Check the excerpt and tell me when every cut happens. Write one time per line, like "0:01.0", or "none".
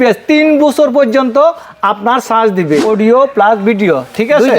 0:02.8